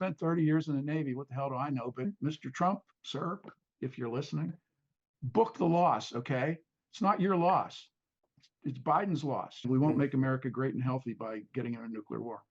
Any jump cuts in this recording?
yes; 3 cuts; at 2.0 s, 4.7 s, 9.6 s

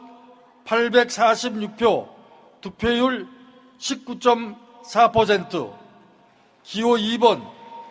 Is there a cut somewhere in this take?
no; 0 cuts

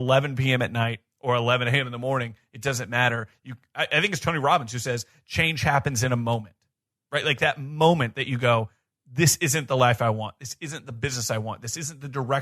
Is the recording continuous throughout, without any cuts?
yes; 0 cuts

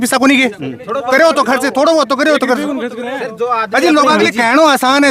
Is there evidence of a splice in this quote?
no; 0 cuts

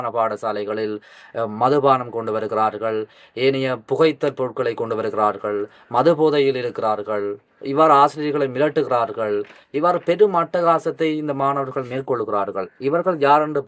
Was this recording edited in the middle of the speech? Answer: no; 0 cuts

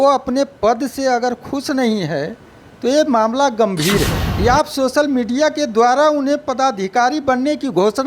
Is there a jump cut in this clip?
yes; 1 cut; at 4.2 s

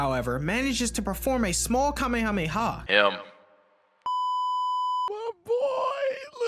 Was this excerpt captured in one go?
no; 1 cut; at 2.8 s

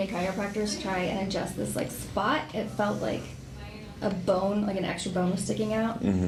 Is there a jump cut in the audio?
no; 0 cuts

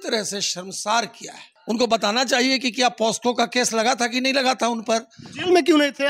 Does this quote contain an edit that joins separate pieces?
yes; 1 cut; at 1.5 s

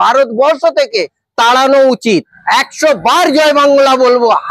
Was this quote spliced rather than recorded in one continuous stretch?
yes; 2 cuts; at 1.2 s, 2.3 s

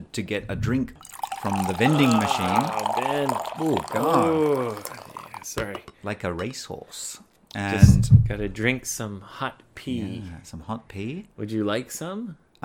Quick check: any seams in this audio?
yes; 1 cut; at 1.0 s

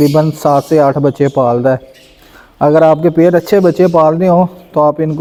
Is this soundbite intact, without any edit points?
yes; 0 cuts

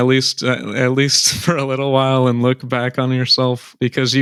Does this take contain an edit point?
no; 0 cuts

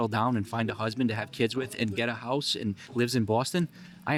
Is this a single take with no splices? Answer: yes; 0 cuts

